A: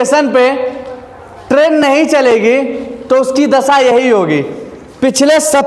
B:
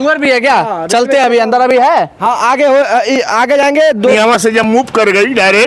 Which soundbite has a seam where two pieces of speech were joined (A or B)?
B